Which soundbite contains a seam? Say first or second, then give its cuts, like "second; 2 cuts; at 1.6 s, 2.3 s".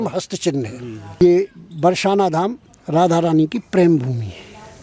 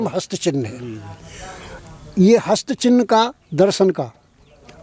first; 1 cut; at 1.2 s